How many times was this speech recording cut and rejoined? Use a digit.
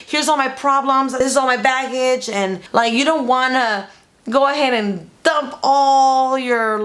2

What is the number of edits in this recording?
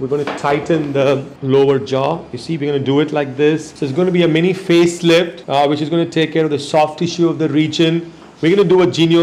3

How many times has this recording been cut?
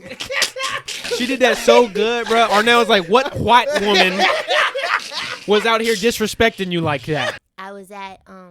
2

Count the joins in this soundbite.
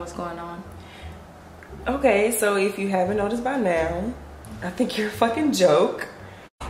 0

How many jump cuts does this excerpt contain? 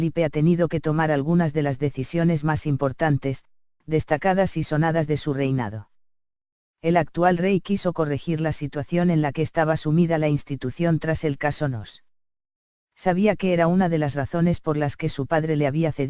1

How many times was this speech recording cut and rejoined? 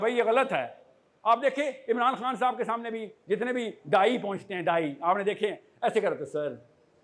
0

